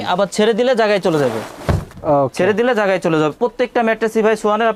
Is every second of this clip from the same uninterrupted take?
yes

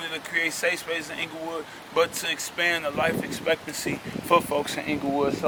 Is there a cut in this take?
no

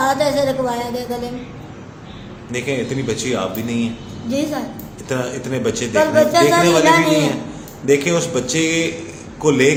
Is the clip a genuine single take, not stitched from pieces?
yes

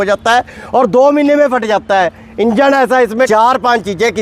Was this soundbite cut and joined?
yes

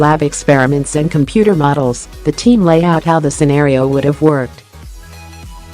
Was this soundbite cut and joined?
yes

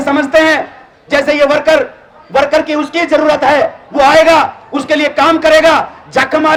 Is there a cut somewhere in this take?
no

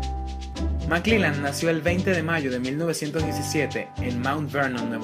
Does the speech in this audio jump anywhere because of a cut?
no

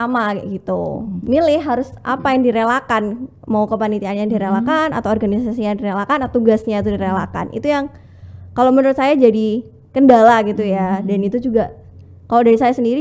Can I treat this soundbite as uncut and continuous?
no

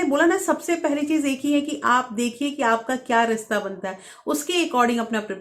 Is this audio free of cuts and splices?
yes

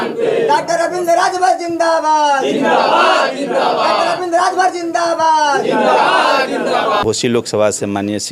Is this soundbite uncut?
no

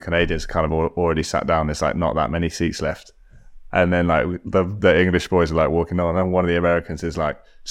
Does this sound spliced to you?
no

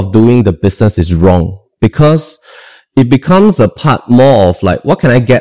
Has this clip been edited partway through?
no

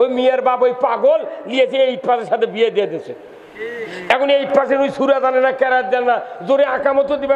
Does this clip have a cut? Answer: no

